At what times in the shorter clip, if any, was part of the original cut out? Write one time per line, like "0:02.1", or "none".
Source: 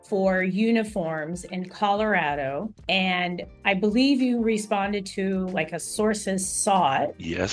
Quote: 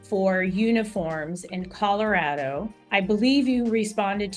0:02.8

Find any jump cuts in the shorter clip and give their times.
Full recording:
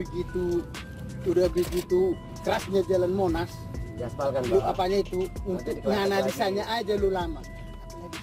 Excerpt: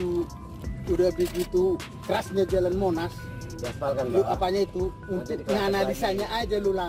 none

